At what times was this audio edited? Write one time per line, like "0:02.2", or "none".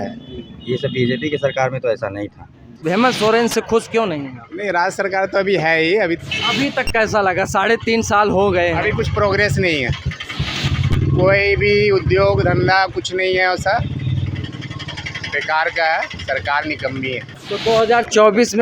0:02.8
0:06.2
0:17.3